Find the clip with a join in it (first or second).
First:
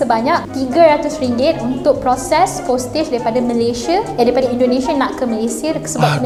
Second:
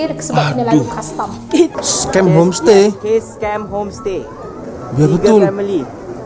second